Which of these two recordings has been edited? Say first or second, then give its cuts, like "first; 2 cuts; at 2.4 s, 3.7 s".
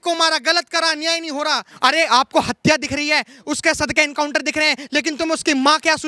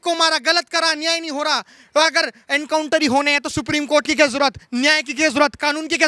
first; 1 cut; at 1.7 s